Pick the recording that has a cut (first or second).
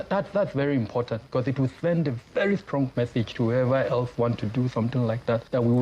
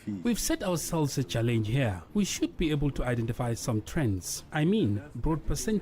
second